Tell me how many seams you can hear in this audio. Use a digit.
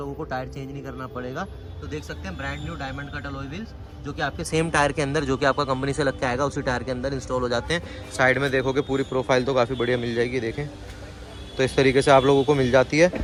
0